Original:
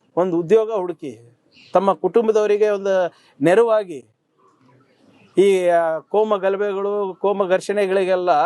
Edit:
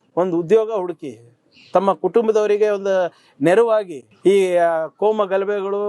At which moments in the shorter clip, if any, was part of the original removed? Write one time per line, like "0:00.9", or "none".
0:04.0